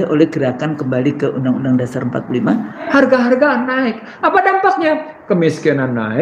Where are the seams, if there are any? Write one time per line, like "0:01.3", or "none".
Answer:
0:02.8